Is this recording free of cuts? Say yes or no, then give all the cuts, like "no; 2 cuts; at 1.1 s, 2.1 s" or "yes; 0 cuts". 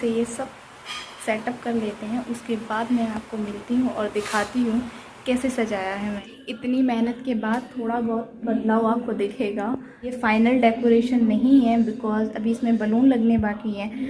no; 2 cuts; at 6.2 s, 10.1 s